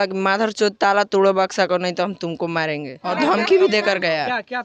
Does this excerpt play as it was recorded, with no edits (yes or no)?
no